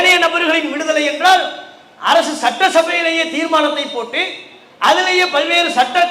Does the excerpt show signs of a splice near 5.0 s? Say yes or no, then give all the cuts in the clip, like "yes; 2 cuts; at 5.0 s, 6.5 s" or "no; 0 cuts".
no; 0 cuts